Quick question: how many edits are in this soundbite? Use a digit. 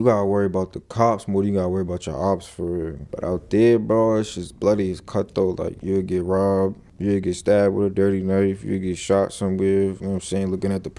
3